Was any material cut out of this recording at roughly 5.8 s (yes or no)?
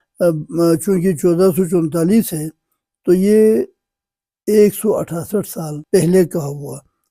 yes